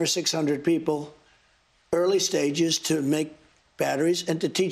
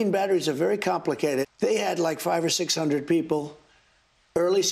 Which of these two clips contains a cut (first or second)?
second